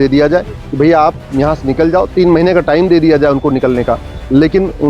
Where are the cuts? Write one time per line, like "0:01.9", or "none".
none

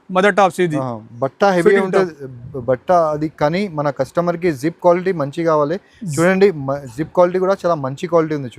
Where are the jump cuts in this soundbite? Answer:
none

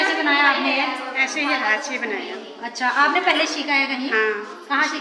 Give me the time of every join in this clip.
none

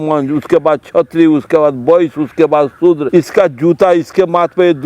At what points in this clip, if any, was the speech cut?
0:03.0

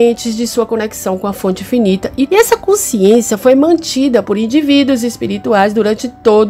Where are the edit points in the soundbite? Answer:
0:02.3

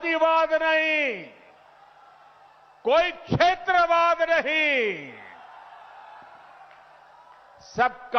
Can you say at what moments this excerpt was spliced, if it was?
0:04.1

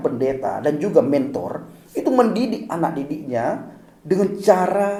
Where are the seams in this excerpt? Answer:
none

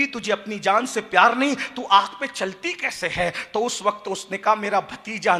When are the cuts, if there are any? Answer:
none

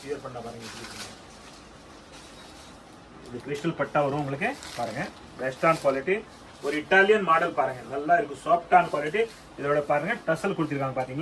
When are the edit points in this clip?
none

